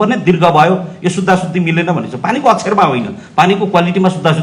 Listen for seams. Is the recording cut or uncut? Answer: uncut